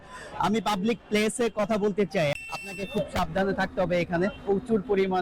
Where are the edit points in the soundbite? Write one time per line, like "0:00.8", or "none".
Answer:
0:02.3